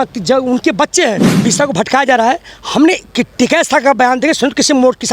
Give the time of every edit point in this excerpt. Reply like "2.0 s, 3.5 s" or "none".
1.3 s